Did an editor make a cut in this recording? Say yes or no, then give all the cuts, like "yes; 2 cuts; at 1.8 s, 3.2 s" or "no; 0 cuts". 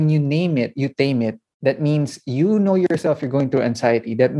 no; 0 cuts